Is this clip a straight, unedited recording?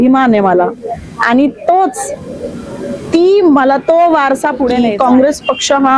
no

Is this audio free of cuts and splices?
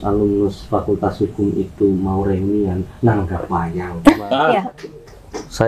no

